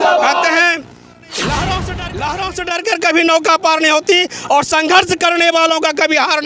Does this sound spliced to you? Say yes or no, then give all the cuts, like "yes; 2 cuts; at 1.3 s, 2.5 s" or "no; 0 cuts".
yes; 1 cut; at 2.3 s